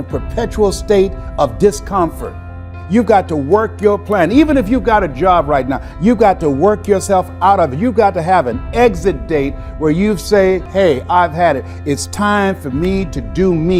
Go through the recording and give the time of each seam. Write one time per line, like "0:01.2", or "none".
0:02.7